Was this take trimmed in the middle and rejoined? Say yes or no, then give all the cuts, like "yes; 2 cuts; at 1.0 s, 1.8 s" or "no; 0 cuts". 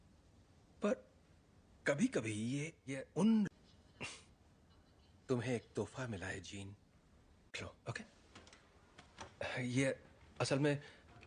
no; 0 cuts